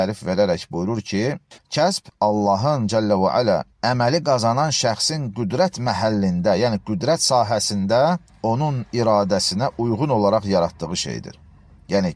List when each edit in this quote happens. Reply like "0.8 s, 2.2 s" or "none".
1.5 s